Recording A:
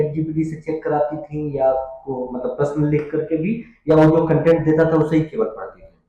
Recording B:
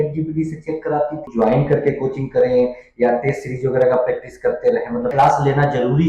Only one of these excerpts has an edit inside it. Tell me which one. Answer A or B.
B